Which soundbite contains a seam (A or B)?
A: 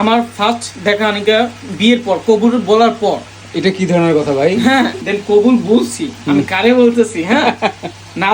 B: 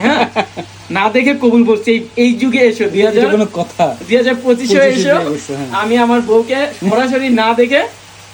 A